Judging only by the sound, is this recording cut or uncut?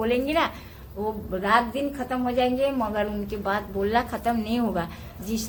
uncut